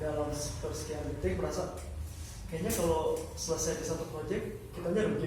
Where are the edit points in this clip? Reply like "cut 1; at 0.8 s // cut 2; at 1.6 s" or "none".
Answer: none